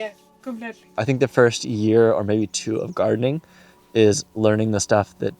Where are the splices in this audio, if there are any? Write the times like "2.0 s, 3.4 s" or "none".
1.0 s

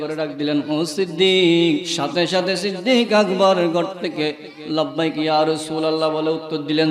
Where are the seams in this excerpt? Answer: 2.0 s

